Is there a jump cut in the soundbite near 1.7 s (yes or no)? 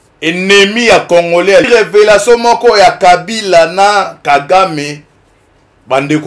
yes